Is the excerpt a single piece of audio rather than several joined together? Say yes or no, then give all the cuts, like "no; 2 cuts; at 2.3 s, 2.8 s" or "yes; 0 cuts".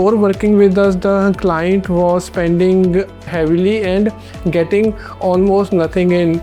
yes; 0 cuts